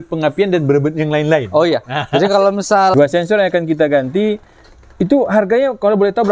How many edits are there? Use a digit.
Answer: 1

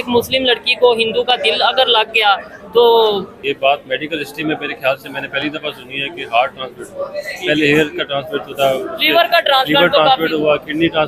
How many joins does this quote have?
1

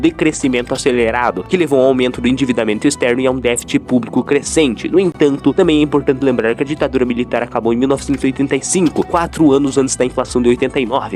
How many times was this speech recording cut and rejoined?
0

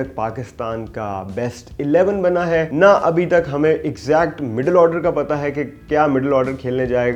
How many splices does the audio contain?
0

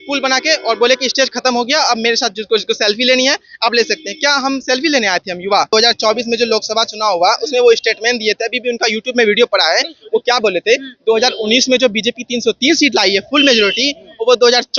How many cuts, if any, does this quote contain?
1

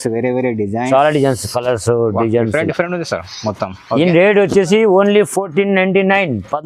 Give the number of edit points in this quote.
0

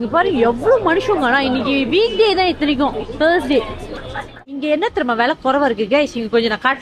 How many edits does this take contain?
1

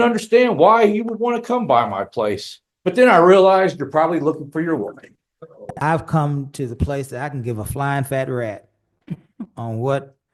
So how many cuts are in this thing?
1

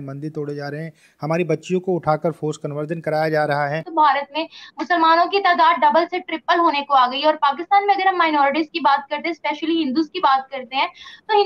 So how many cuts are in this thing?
1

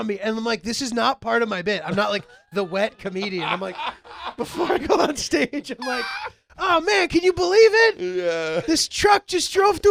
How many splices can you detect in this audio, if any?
0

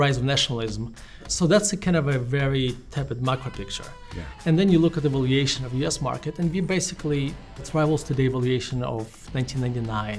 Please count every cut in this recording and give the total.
2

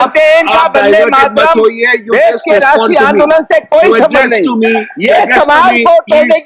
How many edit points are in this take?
0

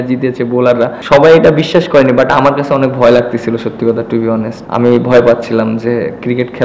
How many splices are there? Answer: 2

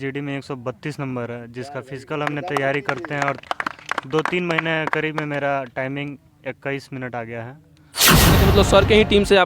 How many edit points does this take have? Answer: 1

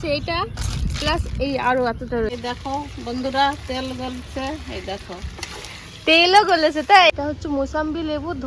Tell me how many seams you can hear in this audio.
2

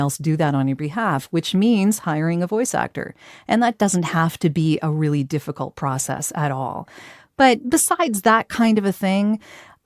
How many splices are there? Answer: 2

